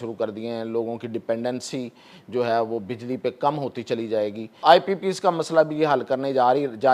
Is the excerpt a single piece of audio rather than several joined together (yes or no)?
no